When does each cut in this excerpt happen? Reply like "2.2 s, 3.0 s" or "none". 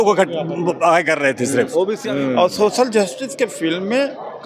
2.0 s